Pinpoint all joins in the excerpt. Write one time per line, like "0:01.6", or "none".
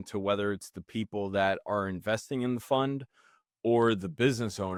none